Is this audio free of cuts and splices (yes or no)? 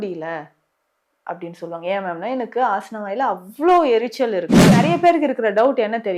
no